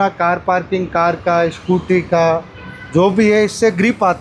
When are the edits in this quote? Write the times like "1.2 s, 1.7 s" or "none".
none

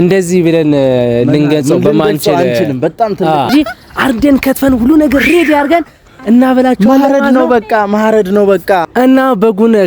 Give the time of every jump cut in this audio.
3.5 s

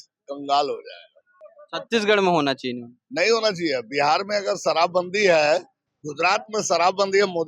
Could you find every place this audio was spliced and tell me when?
none

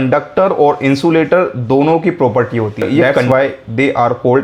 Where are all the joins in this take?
3.2 s

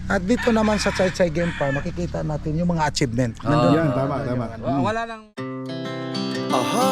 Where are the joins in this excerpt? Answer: 5.3 s

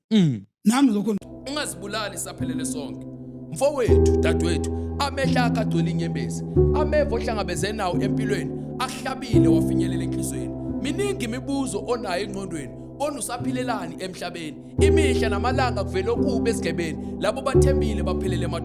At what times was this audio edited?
1.2 s

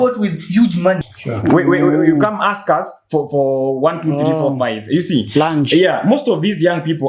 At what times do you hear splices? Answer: 1.0 s

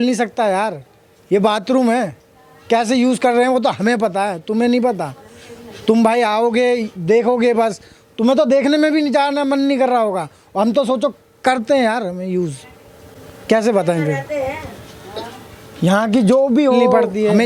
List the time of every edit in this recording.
none

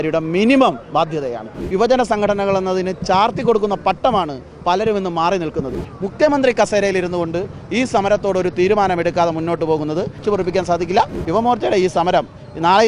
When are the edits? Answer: 1.6 s, 5.7 s, 10.2 s, 11.2 s

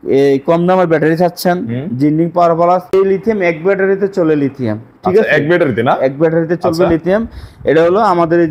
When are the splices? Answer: 2.9 s

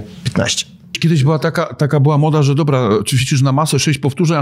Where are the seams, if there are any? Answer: 1.0 s

